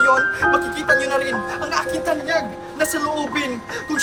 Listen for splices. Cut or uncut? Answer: uncut